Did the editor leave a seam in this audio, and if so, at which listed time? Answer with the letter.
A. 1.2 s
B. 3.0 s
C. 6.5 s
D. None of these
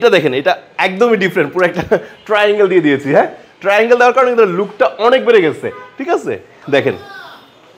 D